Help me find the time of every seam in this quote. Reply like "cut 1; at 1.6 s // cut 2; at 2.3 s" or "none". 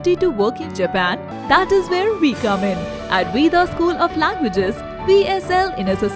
cut 1; at 1.3 s

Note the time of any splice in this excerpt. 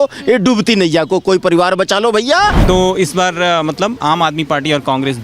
cut 1; at 2.6 s

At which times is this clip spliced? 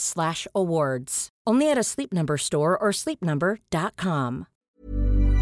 cut 1; at 4.5 s

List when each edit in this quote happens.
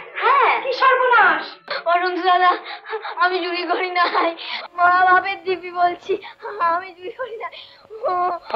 cut 1; at 1.7 s

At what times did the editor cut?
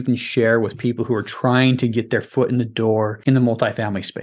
cut 1; at 3.2 s

